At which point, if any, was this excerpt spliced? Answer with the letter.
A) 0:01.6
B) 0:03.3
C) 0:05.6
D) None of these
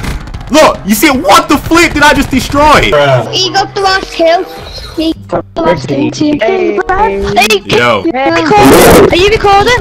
B